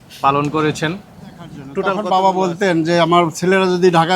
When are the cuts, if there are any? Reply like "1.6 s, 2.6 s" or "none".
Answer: 2.0 s